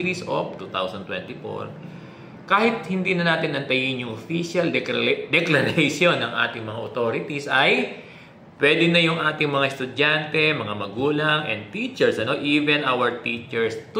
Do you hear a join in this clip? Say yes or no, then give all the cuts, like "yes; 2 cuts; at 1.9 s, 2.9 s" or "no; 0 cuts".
no; 0 cuts